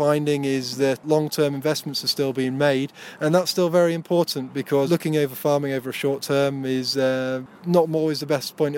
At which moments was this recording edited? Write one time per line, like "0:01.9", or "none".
0:01.0
0:04.9
0:07.5